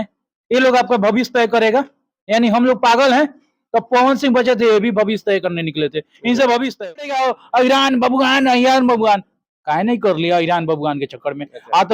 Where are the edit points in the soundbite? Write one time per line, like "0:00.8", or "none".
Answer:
0:07.1